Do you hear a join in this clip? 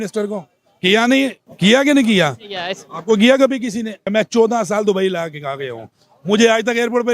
yes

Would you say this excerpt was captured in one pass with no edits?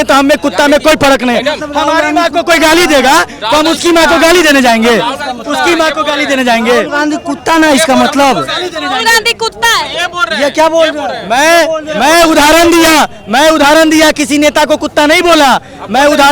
yes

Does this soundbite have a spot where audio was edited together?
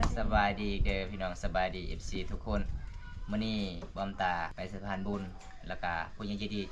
yes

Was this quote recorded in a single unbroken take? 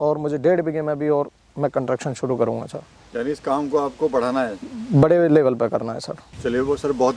yes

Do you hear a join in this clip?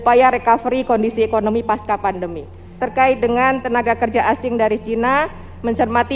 yes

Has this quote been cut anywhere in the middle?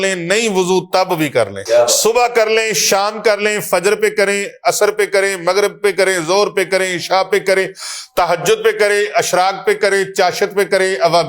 yes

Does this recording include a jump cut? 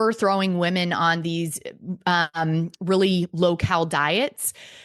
no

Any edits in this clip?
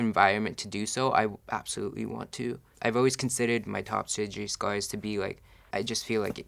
yes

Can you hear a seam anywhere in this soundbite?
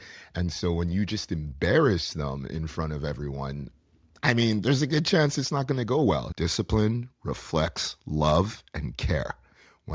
yes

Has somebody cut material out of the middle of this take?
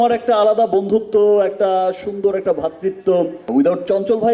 yes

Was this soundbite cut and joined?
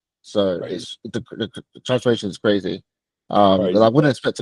no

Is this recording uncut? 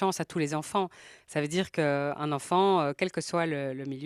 yes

